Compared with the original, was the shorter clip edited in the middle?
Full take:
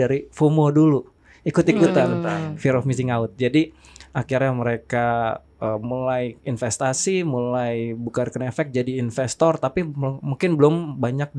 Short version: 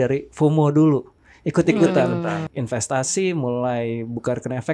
yes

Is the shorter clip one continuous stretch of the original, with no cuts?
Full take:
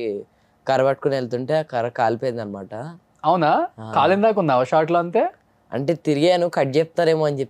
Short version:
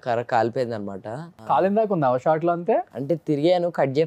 no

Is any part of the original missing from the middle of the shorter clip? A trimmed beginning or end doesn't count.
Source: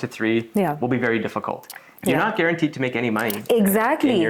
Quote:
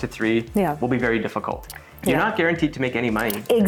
no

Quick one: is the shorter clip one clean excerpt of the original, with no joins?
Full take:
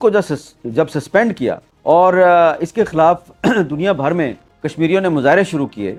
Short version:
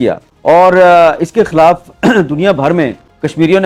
yes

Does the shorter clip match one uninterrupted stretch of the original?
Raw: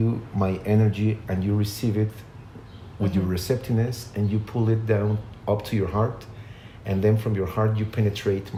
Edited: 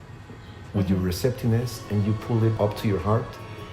no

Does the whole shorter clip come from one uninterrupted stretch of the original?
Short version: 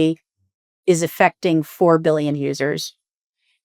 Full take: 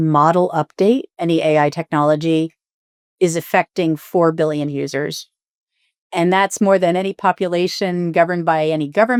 yes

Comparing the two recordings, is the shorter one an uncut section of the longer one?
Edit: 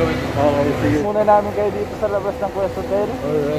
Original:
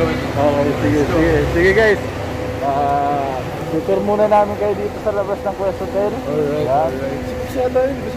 no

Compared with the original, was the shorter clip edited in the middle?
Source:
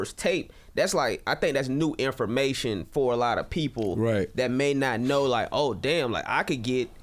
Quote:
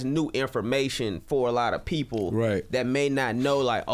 no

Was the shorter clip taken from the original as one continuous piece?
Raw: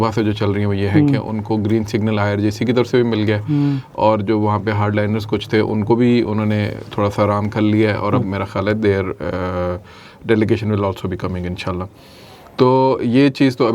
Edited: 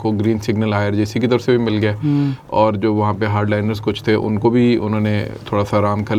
yes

